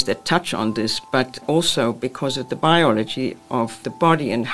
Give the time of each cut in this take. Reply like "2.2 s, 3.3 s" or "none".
none